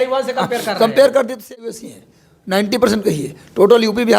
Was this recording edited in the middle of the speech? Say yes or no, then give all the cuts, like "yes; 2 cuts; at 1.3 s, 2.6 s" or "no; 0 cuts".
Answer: yes; 1 cut; at 1.5 s